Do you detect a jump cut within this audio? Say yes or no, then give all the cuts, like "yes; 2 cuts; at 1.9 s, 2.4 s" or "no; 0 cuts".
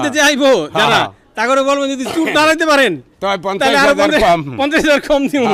no; 0 cuts